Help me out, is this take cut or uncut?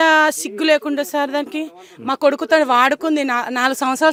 uncut